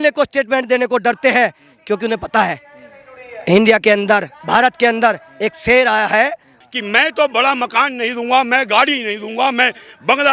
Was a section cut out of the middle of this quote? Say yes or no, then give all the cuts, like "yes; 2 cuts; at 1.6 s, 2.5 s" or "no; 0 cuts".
yes; 1 cut; at 6.5 s